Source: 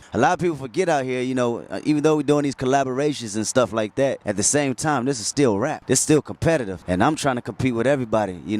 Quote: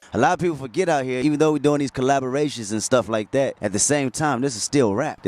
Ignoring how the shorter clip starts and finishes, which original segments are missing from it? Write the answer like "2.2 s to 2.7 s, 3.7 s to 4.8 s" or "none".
1.2 s to 1.8 s

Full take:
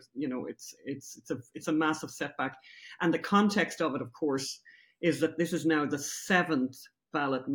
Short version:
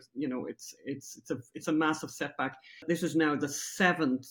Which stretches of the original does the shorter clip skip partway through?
2.8 s to 5.3 s

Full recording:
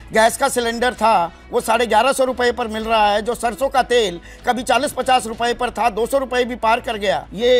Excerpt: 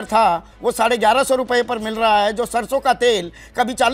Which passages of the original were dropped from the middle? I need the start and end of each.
none

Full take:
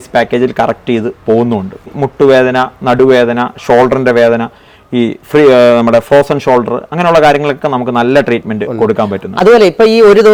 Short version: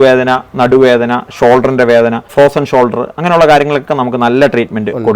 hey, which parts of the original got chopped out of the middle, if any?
4.6 s to 6.1 s

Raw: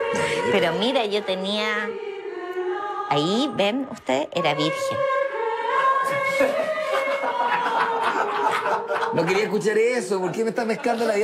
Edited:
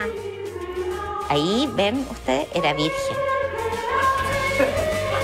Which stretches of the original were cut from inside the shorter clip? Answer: none

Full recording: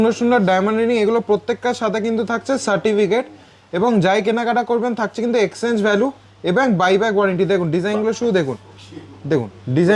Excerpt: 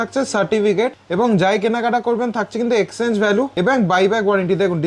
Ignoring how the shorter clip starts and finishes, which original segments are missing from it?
3.3 s to 3.6 s, 6.2 s to 6.4 s

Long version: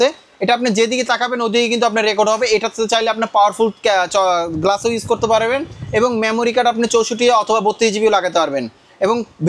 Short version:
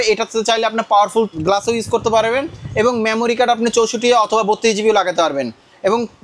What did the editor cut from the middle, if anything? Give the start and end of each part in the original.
3.8 s to 4.5 s

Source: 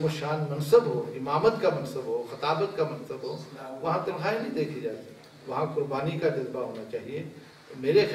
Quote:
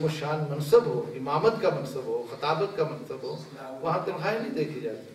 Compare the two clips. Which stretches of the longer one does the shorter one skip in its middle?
none

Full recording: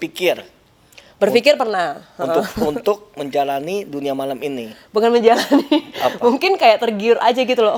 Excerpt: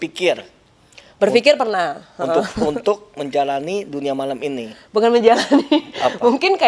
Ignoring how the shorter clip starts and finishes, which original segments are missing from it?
none

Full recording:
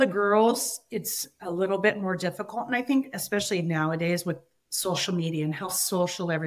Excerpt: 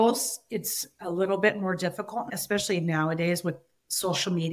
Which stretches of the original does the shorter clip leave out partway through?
2.7 s to 3.1 s

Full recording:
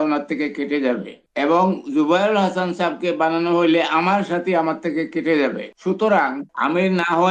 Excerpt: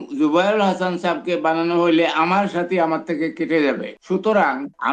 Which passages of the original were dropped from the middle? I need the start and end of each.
none

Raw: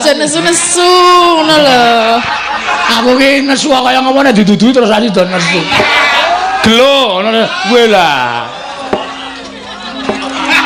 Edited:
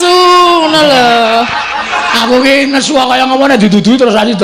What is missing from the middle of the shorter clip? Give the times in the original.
none

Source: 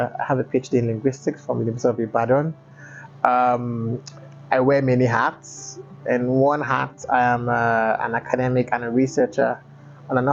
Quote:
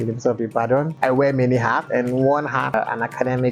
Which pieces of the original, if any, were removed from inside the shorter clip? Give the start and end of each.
2.5 s to 4.4 s, 5.3 s to 6.0 s, 6.9 s to 7.9 s

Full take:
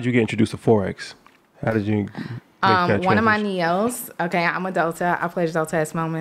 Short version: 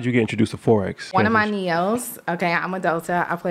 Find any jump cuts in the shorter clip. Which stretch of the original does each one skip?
1.1 s to 3.0 s

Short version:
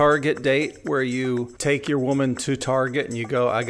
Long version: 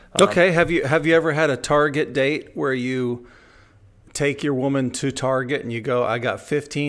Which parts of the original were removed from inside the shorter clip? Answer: 3.2 s to 4.1 s

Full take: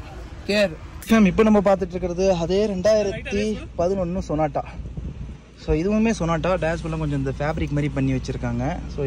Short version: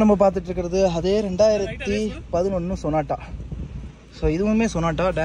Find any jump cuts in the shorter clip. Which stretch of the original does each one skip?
none

